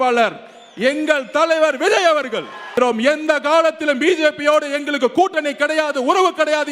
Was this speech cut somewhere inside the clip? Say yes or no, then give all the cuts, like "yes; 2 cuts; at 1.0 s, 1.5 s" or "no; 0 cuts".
yes; 1 cut; at 2.7 s